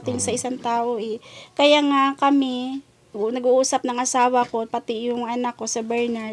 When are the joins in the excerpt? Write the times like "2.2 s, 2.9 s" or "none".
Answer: none